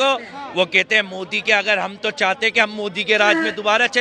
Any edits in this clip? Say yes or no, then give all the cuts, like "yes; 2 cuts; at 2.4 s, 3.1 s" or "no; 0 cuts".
no; 0 cuts